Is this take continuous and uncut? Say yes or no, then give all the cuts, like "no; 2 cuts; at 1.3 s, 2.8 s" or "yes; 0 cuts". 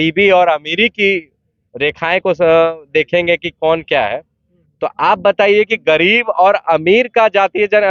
yes; 0 cuts